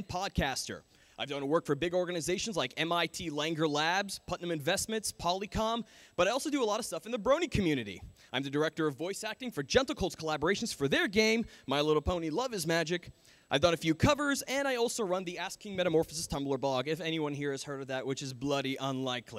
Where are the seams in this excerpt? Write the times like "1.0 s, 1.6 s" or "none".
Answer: 10.9 s